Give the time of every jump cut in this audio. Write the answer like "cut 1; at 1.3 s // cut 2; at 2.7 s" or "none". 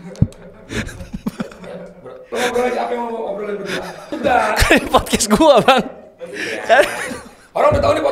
cut 1; at 2.2 s // cut 2; at 4.1 s